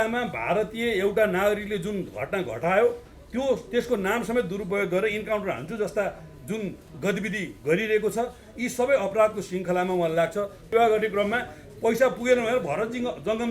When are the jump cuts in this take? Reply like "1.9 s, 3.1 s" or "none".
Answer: 10.6 s